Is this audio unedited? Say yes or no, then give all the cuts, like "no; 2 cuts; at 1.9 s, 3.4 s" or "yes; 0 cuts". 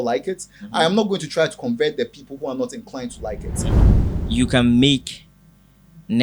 no; 1 cut; at 3.8 s